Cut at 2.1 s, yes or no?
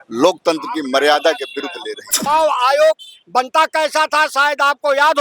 yes